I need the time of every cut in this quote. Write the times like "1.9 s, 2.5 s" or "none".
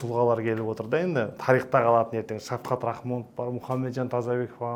none